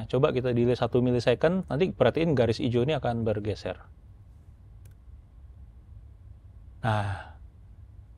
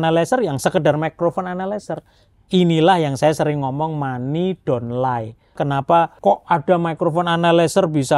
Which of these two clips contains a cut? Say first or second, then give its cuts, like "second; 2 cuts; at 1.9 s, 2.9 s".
second; 1 cut; at 5.8 s